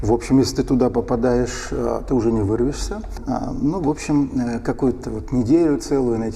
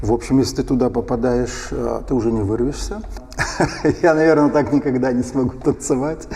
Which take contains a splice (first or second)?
second